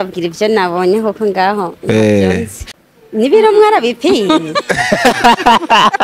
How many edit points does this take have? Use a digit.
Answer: 1